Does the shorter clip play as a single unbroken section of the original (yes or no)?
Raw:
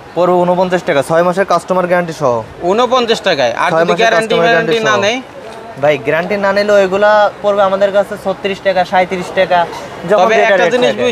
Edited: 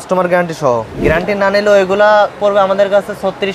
no